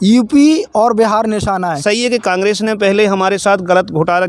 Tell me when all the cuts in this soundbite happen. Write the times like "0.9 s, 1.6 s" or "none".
1.8 s